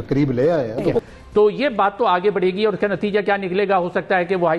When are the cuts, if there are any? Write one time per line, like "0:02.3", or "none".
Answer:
0:01.0